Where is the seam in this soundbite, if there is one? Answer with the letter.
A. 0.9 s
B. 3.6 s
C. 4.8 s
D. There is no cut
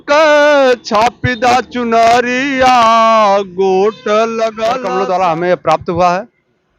C